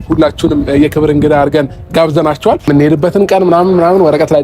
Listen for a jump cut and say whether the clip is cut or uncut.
cut